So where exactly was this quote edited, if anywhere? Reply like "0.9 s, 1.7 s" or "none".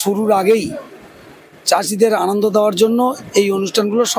none

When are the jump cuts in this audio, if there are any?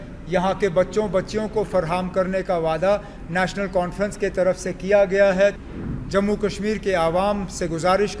5.6 s

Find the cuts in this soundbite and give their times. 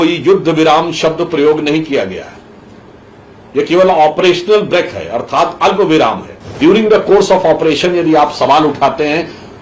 6.6 s

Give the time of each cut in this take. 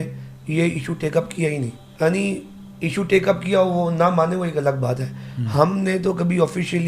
1.8 s

